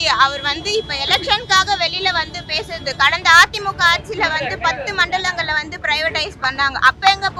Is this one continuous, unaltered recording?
yes; 0 cuts

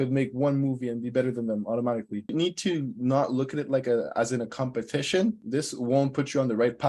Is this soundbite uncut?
no; 2 cuts; at 2.3 s, 5.4 s

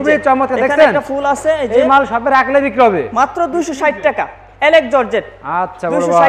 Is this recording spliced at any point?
no; 0 cuts

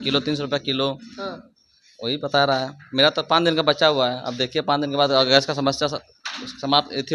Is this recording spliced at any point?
no; 0 cuts

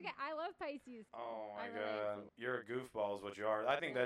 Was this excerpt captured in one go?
no; 2 cuts; at 1.0 s, 2.3 s

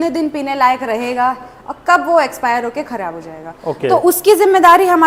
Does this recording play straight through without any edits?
yes; 0 cuts

